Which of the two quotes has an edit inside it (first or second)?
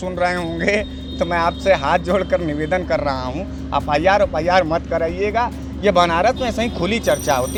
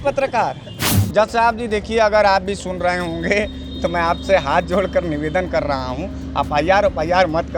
second